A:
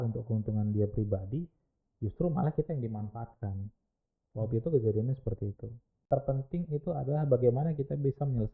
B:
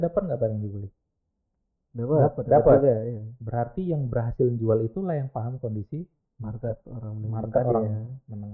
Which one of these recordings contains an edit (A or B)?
A